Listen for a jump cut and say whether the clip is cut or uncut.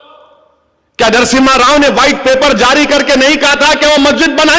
uncut